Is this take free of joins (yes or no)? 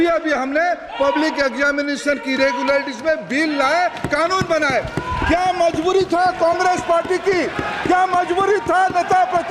yes